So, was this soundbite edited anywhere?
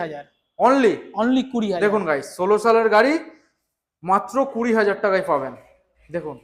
no; 0 cuts

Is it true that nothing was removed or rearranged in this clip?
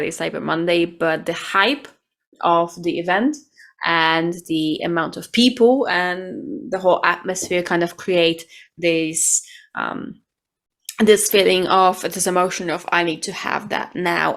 yes; 0 cuts

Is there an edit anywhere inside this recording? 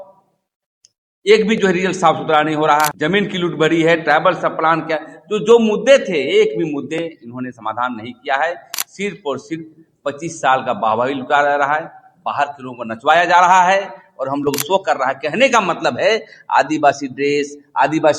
yes; 1 cut; at 2.9 s

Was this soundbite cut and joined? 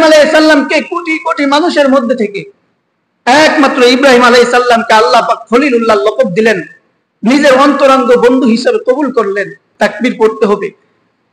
yes; 1 cut; at 9.6 s

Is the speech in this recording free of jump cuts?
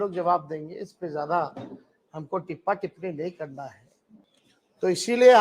no; 1 cut; at 4.3 s

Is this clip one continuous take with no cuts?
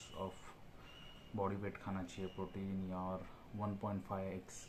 yes; 0 cuts

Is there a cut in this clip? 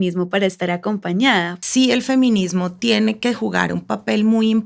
yes; 1 cut; at 1.6 s

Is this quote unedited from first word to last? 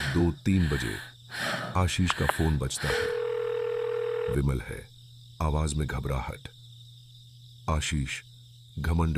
yes; 0 cuts

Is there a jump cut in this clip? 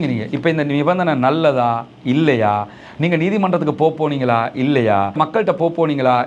yes; 1 cut; at 5.2 s

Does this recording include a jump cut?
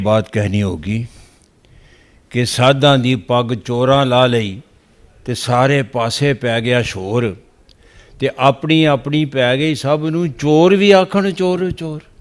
no; 0 cuts

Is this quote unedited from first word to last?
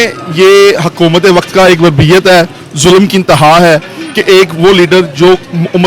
yes; 0 cuts

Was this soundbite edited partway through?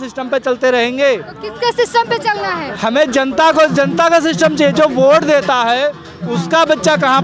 no; 0 cuts

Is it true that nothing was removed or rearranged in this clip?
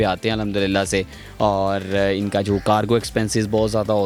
yes; 0 cuts

